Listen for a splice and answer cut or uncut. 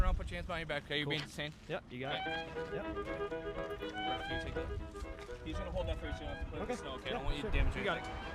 uncut